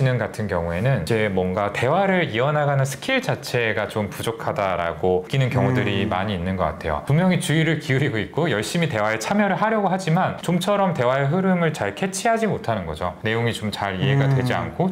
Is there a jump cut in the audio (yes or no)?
no